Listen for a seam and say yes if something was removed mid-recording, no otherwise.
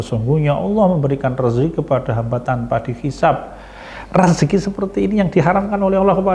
no